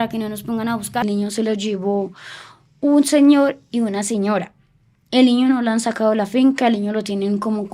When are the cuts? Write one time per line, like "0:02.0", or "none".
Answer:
0:01.0